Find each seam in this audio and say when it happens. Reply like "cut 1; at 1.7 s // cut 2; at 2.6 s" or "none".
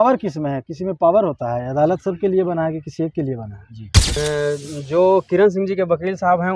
cut 1; at 4.2 s